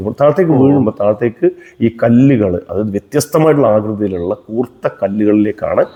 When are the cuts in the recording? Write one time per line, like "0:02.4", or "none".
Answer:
none